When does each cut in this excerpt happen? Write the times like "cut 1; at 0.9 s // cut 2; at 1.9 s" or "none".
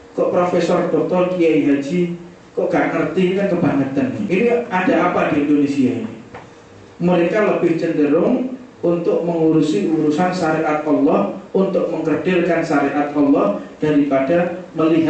cut 1; at 4.2 s